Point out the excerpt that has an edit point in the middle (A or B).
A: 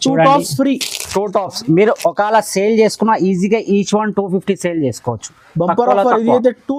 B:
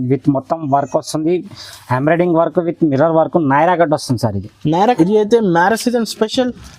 B